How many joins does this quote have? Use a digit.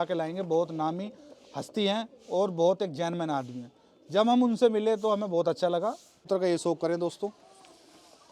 1